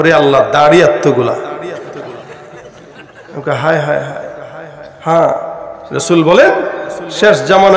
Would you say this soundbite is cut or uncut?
uncut